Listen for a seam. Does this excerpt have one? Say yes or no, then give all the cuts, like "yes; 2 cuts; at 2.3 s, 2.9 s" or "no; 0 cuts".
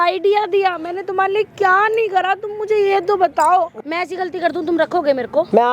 yes; 1 cut; at 3.7 s